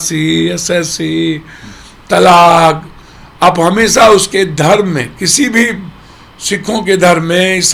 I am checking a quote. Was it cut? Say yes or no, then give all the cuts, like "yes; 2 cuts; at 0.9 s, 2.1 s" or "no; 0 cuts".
no; 0 cuts